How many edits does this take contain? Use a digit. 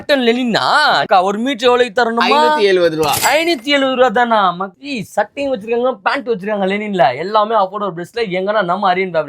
2